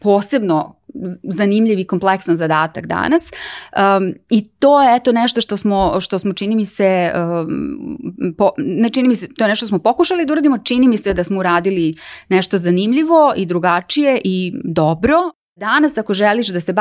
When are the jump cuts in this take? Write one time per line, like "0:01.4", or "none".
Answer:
0:15.3